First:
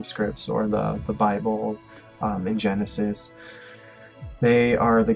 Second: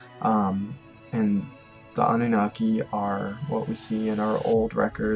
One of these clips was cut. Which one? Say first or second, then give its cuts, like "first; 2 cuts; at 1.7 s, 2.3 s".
second; 1 cut; at 3.4 s